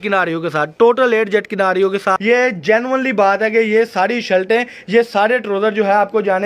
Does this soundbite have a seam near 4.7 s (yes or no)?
no